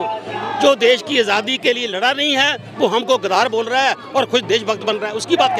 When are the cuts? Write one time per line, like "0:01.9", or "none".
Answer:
none

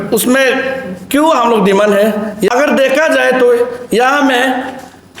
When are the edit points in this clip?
0:02.5

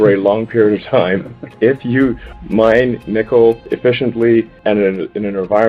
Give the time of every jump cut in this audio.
0:03.7
0:04.5

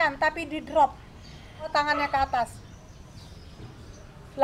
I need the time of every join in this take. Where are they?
0:01.7

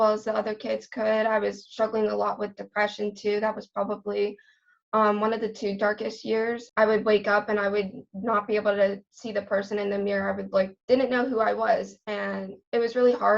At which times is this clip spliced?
0:10.8

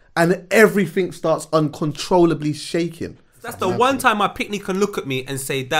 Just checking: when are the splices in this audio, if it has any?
0:03.5

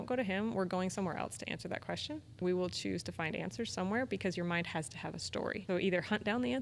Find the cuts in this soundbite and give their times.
0:02.3
0:05.6

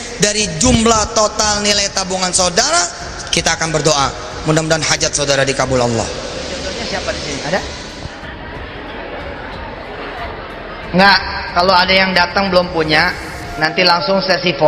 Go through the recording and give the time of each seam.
0:06.8

